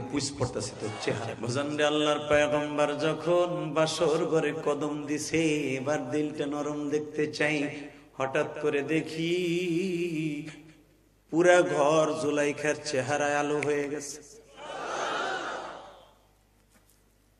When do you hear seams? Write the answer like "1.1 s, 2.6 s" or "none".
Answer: 1.3 s